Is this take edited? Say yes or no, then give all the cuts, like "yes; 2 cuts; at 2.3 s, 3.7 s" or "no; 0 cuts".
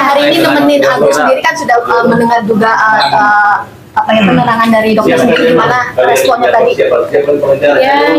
no; 0 cuts